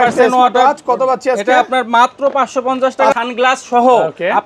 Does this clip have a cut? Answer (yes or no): yes